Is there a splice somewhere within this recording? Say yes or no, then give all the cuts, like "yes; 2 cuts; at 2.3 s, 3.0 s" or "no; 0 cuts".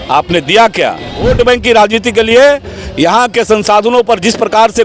yes; 1 cut; at 1.2 s